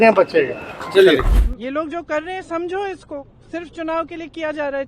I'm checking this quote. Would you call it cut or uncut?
cut